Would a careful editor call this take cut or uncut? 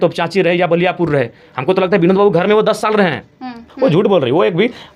cut